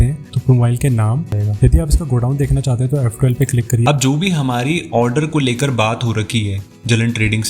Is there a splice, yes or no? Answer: yes